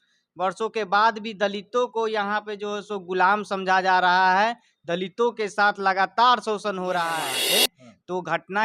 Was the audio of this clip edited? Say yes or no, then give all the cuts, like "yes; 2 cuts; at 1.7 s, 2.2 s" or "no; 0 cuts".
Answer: yes; 1 cut; at 7.4 s